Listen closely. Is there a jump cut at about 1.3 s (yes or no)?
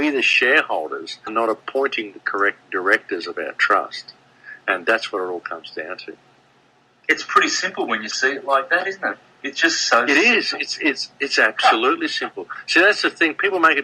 yes